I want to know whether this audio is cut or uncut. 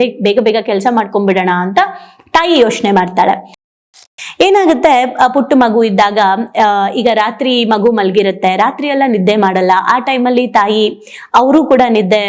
cut